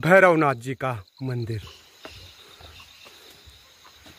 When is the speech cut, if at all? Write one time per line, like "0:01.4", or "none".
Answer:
0:01.6